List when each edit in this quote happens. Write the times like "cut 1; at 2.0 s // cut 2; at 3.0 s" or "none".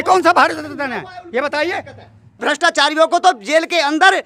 cut 1; at 2.4 s